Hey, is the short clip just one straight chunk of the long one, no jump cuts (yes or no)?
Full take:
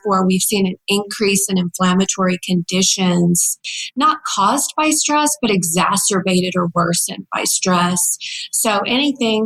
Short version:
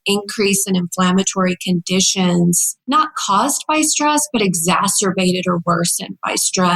no